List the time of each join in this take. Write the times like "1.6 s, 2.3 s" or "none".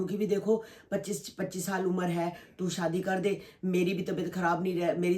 none